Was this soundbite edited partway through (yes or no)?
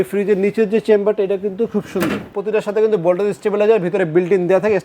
yes